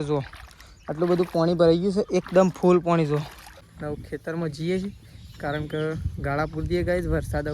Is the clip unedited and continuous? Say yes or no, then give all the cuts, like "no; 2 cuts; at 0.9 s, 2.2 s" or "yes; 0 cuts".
no; 1 cut; at 3.8 s